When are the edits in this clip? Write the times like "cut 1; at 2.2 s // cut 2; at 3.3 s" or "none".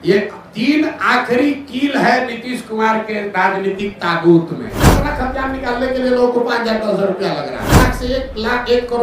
cut 1; at 4.9 s // cut 2; at 7.8 s